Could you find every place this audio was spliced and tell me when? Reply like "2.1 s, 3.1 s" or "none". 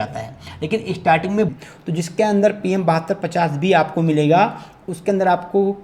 1.6 s